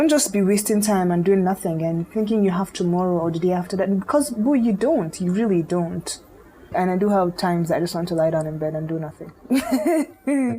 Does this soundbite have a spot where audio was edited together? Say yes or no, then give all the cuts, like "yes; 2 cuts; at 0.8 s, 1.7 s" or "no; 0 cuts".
yes; 2 cuts; at 6.7 s, 9.3 s